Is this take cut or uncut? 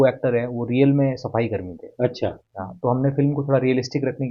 uncut